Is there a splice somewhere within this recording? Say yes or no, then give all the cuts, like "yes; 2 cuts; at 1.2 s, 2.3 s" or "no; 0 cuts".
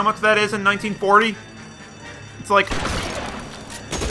no; 0 cuts